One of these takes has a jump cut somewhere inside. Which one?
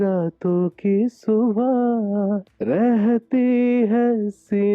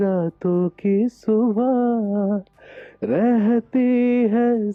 first; 1 cut; at 2.5 s

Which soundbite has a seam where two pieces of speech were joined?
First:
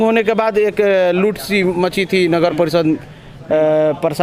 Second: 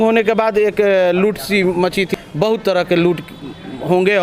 second; 1 cut; at 2.1 s

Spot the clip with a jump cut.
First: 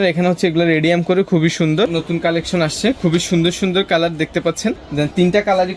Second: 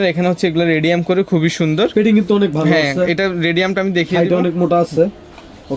first; 2 cuts; at 1.9 s, 4.8 s

